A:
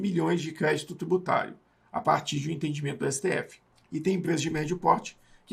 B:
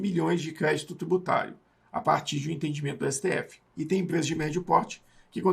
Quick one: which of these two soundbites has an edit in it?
B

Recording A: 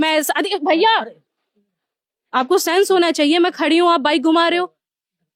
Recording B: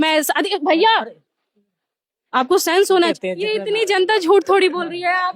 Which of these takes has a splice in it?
B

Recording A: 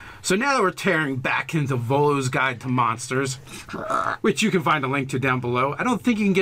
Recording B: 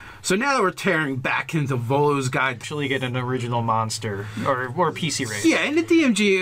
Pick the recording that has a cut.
A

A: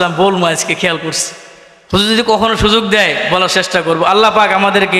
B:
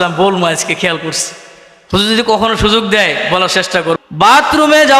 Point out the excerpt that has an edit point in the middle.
B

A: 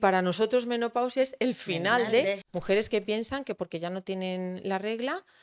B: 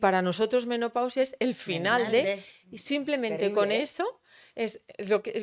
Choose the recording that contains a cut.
A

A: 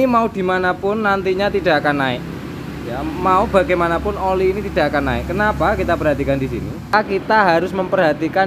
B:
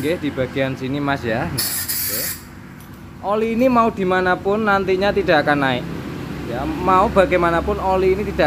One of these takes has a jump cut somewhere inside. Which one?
A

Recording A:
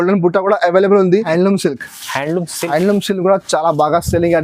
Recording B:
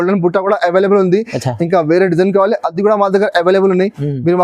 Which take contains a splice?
A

